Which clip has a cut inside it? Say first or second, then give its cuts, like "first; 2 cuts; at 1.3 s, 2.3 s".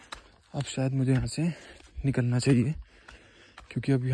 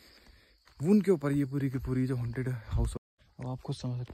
second; 1 cut; at 3.0 s